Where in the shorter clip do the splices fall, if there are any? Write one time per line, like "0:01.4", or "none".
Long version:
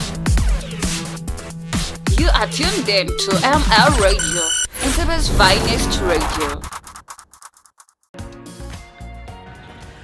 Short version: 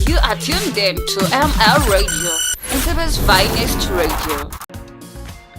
0:04.6